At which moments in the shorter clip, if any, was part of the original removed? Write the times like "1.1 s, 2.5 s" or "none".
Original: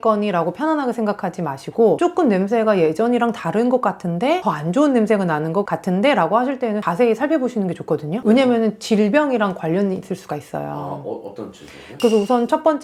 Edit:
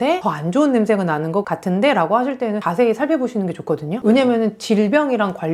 none